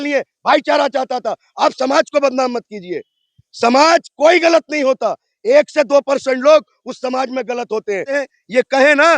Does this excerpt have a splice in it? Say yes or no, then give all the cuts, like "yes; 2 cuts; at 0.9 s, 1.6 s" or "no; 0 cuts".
yes; 1 cut; at 8.1 s